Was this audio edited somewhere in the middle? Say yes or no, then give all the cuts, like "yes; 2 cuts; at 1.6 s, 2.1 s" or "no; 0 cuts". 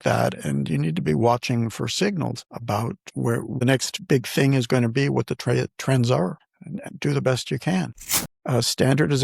yes; 3 cuts; at 3.7 s, 6.9 s, 8.4 s